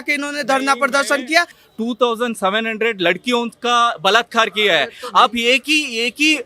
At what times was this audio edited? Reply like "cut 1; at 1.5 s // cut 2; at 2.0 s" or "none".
cut 1; at 1.6 s

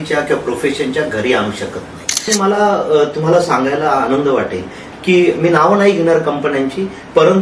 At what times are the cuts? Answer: cut 1; at 2.3 s

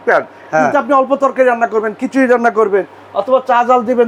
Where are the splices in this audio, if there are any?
none

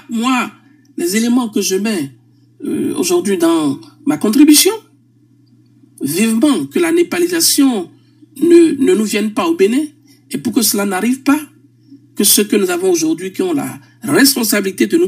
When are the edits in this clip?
none

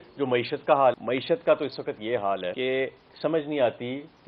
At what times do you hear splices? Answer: cut 1; at 1.0 s // cut 2; at 2.5 s

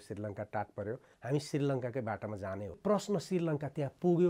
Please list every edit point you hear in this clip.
cut 1; at 1.1 s // cut 2; at 2.8 s

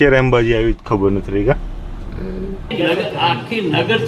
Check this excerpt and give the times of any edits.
cut 1; at 2.6 s

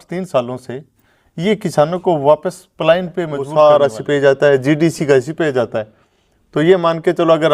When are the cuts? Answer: cut 1; at 3.5 s

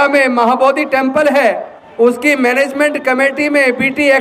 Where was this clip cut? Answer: cut 1; at 1.8 s

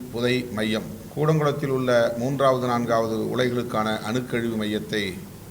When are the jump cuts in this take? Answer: cut 1; at 1.0 s

